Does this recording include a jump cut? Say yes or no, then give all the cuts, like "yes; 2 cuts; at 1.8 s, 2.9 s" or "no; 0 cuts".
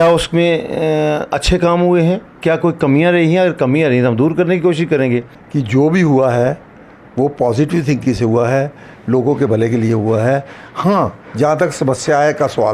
yes; 1 cut; at 5.4 s